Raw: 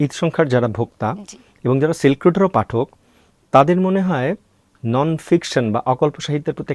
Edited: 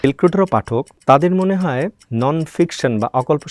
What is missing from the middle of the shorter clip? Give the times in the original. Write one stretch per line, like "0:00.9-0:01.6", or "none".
0:02.9-0:03.4
0:04.5-0:04.7